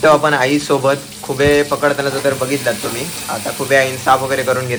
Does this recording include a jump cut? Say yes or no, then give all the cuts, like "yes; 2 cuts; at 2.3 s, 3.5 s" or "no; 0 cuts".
no; 0 cuts